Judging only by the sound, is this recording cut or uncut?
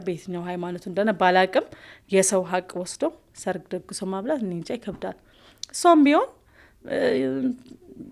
uncut